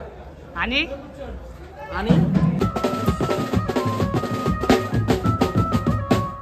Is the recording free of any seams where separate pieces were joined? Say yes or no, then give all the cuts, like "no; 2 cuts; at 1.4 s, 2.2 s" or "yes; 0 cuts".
no; 1 cut; at 2.6 s